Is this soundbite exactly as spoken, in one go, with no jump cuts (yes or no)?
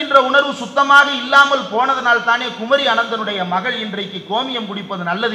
yes